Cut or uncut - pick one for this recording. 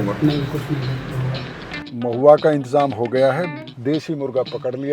cut